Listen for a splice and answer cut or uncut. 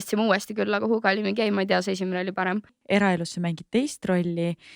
cut